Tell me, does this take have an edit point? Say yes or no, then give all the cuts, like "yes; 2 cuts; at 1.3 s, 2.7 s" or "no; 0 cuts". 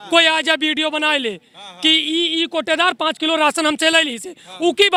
no; 0 cuts